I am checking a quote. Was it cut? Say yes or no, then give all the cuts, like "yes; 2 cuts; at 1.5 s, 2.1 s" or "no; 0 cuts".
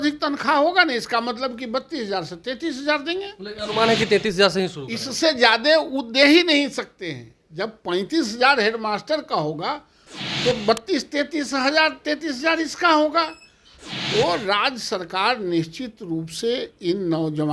no; 0 cuts